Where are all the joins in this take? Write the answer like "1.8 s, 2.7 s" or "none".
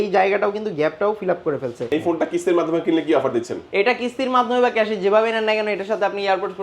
1.9 s